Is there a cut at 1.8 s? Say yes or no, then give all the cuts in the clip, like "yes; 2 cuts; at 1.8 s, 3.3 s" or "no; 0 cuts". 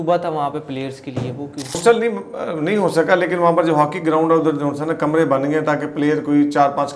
yes; 1 cut; at 1.8 s